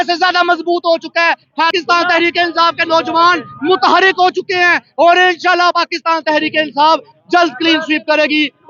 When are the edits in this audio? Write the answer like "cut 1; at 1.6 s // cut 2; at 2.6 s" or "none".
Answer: cut 1; at 1.7 s